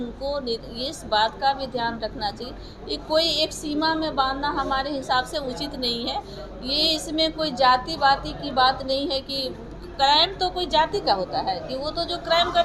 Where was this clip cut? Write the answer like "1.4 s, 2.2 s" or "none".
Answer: none